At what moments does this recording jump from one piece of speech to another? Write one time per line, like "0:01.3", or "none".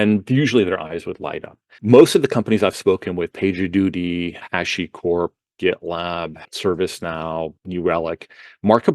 0:01.8
0:04.4
0:06.4
0:07.6